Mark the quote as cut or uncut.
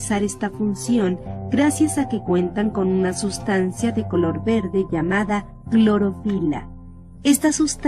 uncut